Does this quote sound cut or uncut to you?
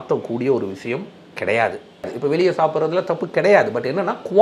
cut